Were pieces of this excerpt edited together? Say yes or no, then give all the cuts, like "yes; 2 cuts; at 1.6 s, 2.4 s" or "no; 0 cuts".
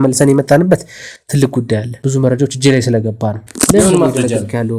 yes; 2 cuts; at 1.9 s, 3.4 s